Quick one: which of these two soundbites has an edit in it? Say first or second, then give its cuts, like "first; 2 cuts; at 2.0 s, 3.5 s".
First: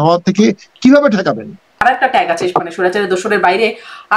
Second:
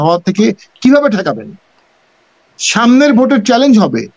first; 1 cut; at 1.8 s